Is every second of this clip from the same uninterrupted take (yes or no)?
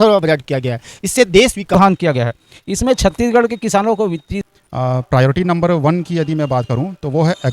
no